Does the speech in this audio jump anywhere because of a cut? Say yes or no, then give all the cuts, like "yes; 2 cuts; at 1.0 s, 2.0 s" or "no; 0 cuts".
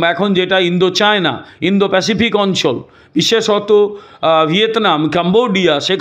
no; 0 cuts